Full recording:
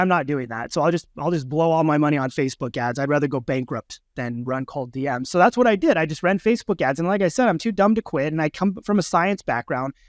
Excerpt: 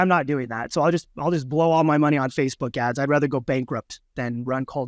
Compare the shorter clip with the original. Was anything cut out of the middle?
no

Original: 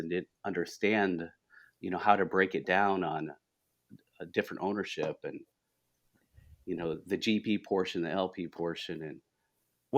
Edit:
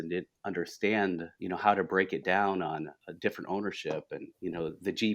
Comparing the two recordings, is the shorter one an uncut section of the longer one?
no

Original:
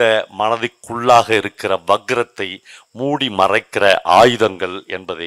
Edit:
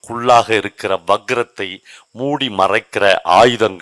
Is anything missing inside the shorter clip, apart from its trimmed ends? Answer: no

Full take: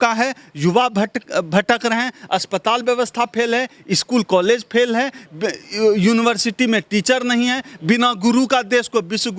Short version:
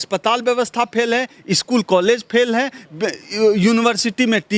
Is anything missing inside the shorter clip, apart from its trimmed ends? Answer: no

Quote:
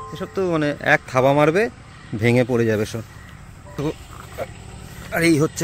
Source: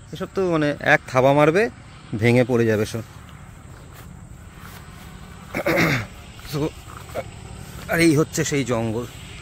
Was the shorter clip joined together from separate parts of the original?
yes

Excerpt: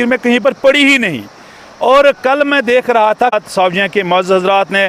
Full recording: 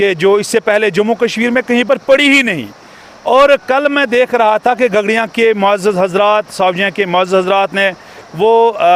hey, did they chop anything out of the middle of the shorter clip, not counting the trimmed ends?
yes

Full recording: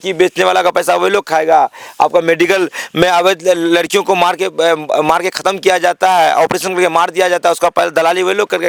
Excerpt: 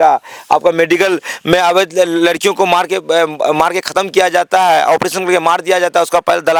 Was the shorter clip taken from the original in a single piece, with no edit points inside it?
yes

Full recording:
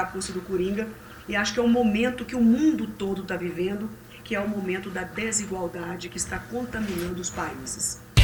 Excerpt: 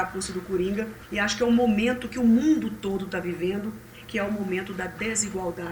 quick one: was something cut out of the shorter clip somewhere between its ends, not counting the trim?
yes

